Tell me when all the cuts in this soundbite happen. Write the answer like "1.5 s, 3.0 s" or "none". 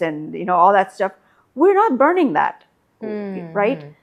none